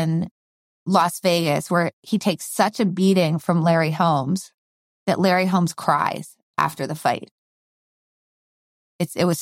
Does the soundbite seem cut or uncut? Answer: uncut